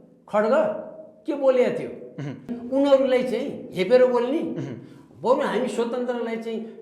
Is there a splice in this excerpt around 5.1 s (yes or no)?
no